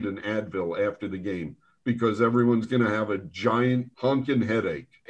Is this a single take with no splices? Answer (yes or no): yes